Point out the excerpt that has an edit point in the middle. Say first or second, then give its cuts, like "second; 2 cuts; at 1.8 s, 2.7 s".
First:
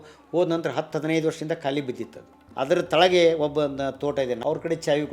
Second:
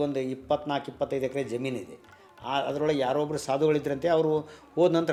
first; 2 cuts; at 2.4 s, 4.4 s